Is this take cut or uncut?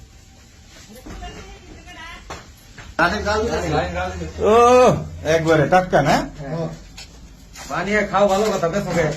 uncut